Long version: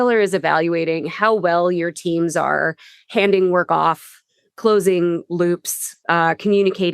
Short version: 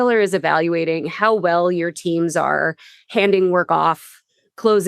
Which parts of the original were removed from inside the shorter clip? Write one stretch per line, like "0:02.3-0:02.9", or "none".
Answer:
none